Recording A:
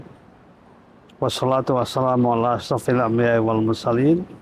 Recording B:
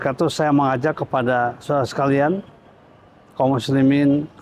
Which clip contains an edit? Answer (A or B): A